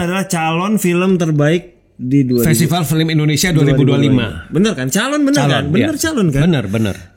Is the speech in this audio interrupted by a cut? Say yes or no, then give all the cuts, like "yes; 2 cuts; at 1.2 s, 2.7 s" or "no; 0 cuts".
no; 0 cuts